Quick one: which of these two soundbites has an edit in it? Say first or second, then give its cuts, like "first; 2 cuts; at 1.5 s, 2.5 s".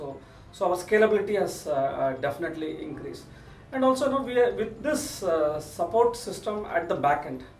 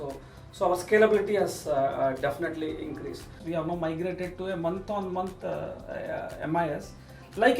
second; 1 cut; at 3.4 s